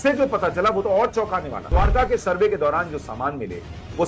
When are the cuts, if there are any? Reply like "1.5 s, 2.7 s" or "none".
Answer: 1.6 s